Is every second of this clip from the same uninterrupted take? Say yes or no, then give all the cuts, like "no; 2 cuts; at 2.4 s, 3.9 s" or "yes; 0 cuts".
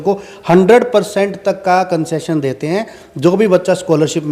yes; 0 cuts